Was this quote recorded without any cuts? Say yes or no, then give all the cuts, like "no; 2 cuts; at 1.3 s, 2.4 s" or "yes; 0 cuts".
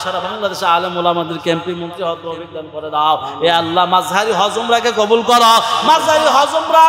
yes; 0 cuts